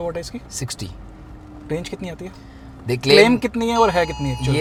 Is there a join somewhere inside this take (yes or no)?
no